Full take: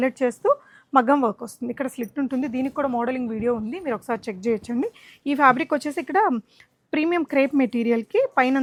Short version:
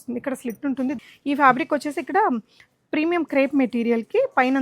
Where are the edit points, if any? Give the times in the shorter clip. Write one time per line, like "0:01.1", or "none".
0:01.0